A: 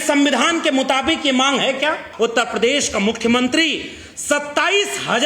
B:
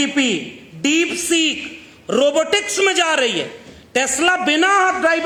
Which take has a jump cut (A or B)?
A